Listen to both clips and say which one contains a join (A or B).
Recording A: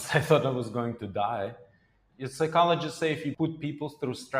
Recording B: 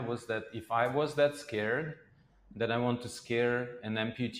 A